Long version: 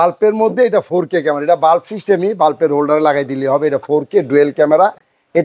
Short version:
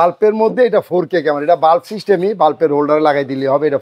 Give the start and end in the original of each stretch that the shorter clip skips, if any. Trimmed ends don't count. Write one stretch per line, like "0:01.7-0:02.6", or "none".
none